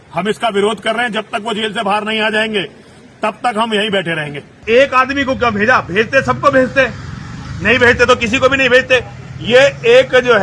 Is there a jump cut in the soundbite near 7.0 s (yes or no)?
no